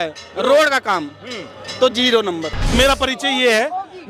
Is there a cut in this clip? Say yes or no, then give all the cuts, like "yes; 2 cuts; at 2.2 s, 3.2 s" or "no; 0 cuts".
yes; 1 cut; at 2.7 s